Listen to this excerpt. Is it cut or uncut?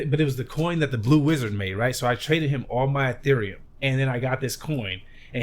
cut